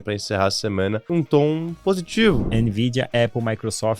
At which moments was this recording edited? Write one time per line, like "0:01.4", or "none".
0:01.0
0:02.5